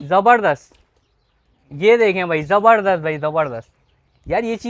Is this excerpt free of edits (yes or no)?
yes